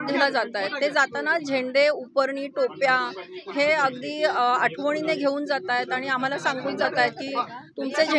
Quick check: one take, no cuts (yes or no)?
yes